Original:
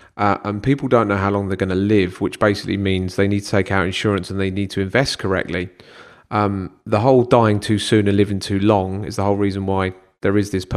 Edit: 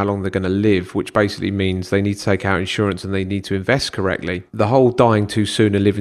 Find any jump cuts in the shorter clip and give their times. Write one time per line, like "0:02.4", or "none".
0:04.5